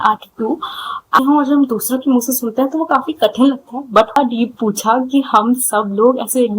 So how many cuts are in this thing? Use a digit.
2